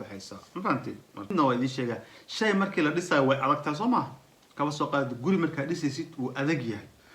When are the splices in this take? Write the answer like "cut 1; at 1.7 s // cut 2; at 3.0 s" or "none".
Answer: cut 1; at 1.3 s

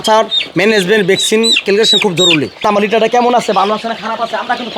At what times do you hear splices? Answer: cut 1; at 2.6 s

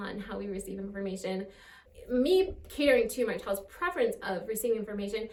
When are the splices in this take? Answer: none

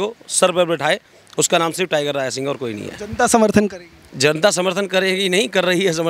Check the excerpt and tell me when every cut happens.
none

